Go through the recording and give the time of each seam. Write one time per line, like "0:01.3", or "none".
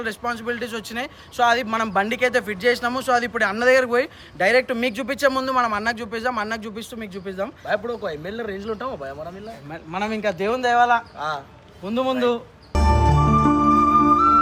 none